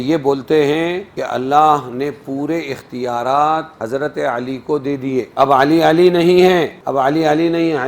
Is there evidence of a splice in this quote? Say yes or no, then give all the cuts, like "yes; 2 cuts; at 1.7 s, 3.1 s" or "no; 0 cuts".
yes; 4 cuts; at 1.1 s, 3.7 s, 5.3 s, 6.8 s